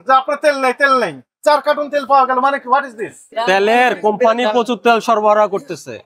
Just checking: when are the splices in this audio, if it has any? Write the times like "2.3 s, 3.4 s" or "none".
3.2 s

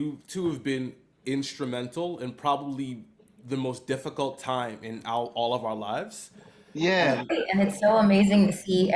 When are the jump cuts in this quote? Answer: 7.3 s

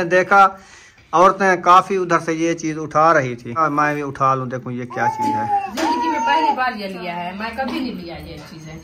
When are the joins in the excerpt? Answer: 3.6 s, 5.7 s

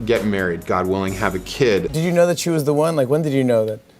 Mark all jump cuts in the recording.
1.9 s

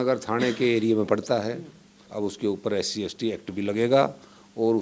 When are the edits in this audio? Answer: 2.0 s

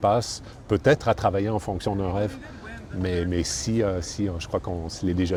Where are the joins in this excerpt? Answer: none

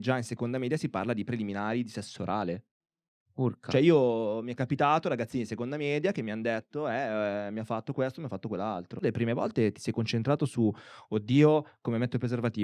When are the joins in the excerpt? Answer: 9.0 s

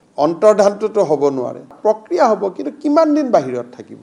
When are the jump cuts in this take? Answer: 1.7 s

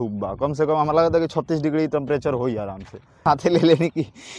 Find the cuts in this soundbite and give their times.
3.2 s

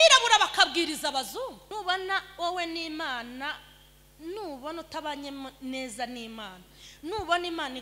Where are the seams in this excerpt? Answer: 1.6 s

